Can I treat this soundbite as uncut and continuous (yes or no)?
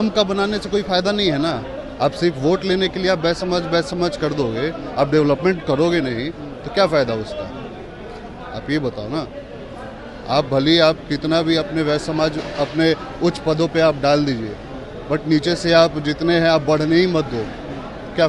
yes